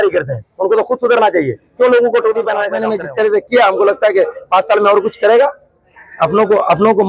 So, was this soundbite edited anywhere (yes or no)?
yes